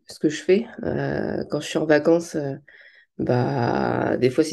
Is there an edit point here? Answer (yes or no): no